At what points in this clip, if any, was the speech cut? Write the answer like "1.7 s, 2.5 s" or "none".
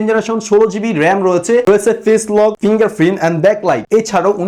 none